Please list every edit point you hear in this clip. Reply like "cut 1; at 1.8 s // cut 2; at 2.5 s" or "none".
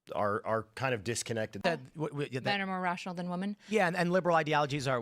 cut 1; at 1.6 s